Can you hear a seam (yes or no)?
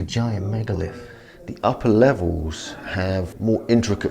yes